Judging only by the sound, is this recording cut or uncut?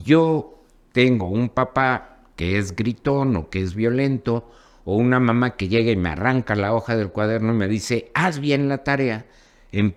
uncut